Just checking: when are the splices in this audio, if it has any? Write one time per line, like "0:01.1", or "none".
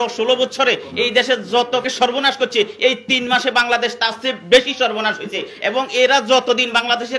0:01.8